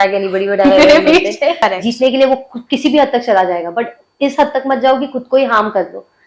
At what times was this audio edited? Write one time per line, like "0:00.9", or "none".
0:01.6